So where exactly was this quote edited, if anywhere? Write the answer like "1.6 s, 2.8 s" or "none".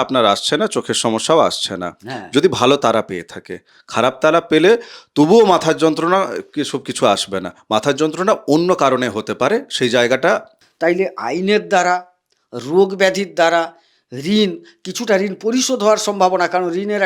10.6 s